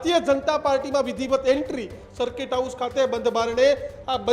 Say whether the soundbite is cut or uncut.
cut